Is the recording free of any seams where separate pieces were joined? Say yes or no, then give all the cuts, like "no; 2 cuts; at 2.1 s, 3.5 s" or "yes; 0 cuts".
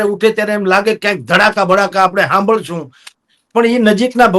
yes; 0 cuts